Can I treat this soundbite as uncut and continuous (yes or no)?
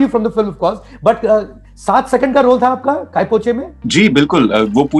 yes